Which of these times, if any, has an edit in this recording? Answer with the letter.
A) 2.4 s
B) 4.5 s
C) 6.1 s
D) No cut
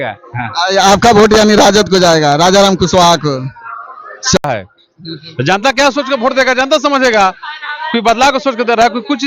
B